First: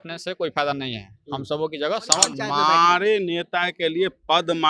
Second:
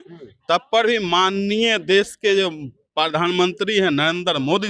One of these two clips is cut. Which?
first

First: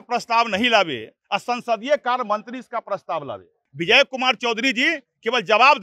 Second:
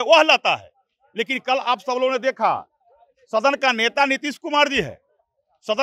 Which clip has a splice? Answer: first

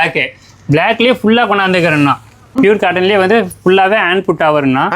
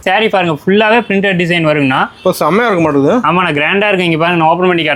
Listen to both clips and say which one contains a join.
first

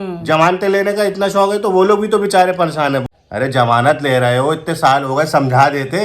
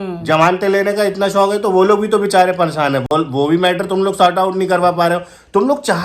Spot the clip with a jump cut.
first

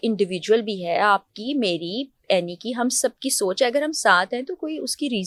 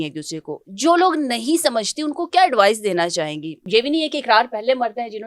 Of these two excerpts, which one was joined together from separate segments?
second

